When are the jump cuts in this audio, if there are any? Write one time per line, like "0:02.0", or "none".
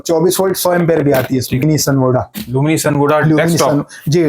0:01.6